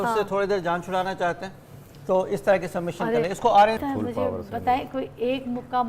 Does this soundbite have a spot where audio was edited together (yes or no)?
yes